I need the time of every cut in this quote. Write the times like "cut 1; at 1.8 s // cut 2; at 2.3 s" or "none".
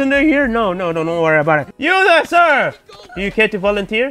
cut 1; at 1.7 s

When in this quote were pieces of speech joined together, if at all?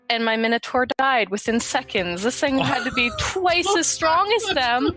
none

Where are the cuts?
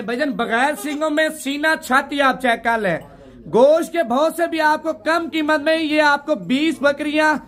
none

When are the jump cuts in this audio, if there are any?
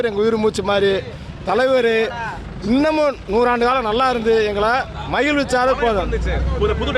none

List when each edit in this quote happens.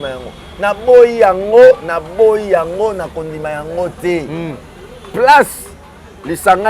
none

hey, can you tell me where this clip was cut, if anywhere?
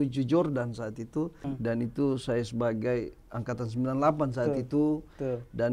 cut 1; at 1.4 s

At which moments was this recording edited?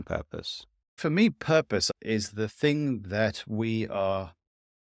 cut 1; at 1.0 s // cut 2; at 1.9 s

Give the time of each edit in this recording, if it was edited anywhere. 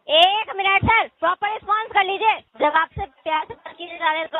cut 1; at 2.5 s

